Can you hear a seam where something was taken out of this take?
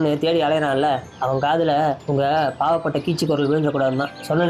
no; 0 cuts

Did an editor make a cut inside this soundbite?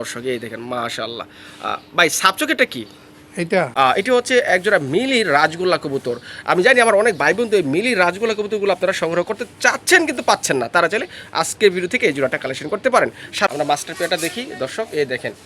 yes; 2 cuts; at 3.7 s, 13.5 s

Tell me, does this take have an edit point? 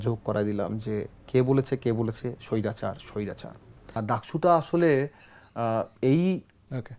yes; 1 cut; at 4.0 s

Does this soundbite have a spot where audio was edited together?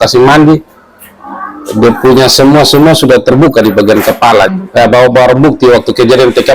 yes; 1 cut; at 4.5 s

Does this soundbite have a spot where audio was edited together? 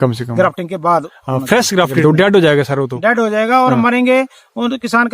yes; 1 cut; at 2.0 s

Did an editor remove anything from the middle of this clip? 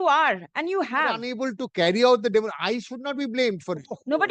yes; 1 cut; at 1.3 s

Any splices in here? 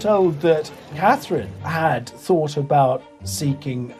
no; 0 cuts

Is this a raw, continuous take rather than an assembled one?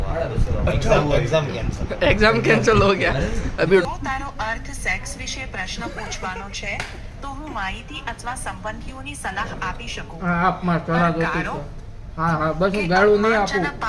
no; 1 cut; at 3.8 s

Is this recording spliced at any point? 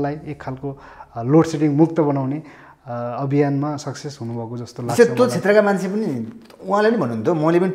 no; 0 cuts

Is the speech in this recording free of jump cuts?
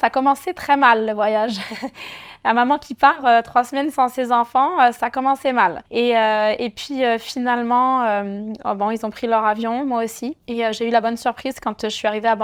yes; 0 cuts

